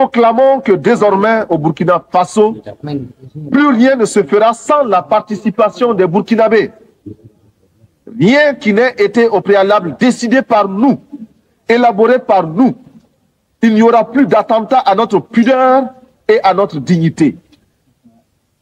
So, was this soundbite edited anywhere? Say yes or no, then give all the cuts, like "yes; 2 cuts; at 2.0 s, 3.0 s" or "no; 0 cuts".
no; 0 cuts